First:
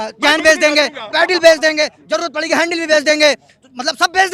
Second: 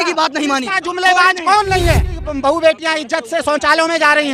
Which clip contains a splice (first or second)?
second